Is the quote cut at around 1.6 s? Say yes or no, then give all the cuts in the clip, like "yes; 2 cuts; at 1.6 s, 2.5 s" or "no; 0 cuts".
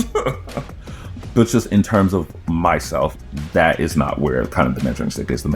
no; 1 cut; at 3.1 s